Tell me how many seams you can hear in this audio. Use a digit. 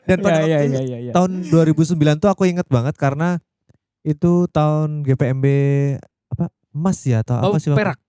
0